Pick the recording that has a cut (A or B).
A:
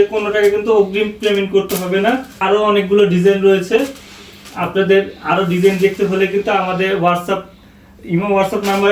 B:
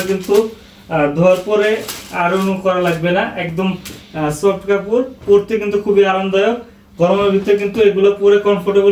A